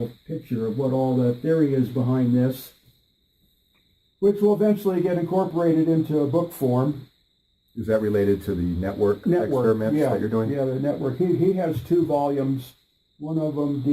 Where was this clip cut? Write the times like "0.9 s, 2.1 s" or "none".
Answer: 9.1 s